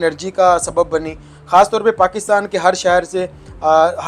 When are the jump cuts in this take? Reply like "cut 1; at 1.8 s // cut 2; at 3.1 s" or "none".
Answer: none

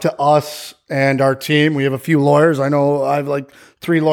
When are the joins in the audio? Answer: none

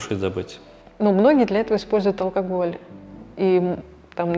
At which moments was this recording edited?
none

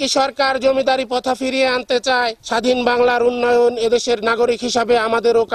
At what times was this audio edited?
cut 1; at 2.4 s

